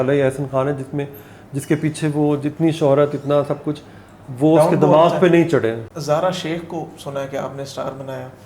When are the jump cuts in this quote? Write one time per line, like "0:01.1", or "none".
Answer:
0:05.9

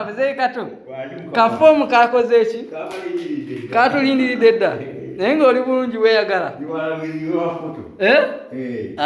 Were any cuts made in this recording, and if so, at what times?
none

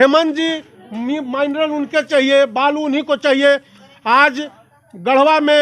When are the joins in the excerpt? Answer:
none

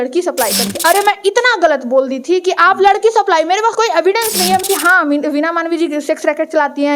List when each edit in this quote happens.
0:00.8
0:04.6

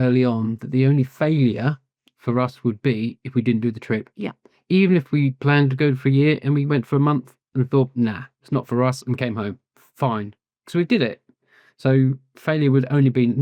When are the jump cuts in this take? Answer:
none

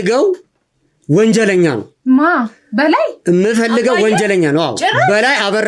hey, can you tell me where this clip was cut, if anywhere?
none

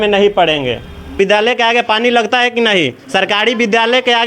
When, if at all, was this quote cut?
0:01.2

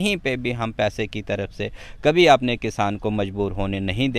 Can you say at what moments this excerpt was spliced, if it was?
none

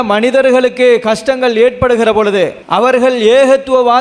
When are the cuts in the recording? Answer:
0:02.6

